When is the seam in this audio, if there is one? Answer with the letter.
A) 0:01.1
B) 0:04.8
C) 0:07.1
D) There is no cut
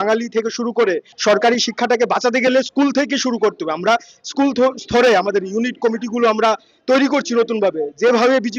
A